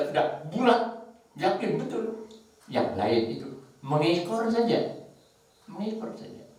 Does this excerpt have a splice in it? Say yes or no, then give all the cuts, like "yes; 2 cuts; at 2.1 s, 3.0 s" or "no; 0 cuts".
no; 0 cuts